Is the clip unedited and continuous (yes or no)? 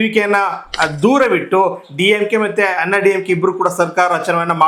yes